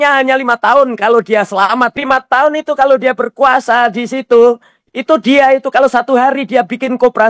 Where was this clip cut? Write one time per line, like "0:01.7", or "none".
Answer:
0:02.0